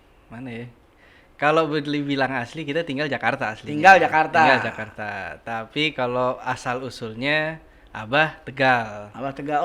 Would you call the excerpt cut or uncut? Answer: uncut